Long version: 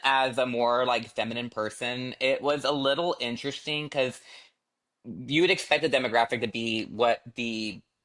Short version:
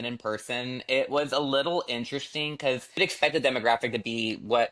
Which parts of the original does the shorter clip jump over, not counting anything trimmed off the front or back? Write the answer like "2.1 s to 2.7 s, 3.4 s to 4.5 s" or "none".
4.3 s to 5.5 s